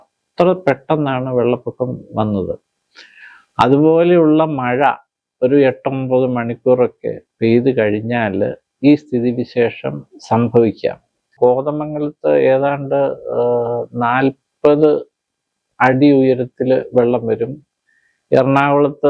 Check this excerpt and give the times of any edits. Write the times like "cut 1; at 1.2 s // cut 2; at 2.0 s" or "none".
cut 1; at 11.3 s